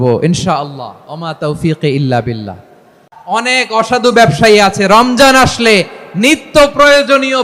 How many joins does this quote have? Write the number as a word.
one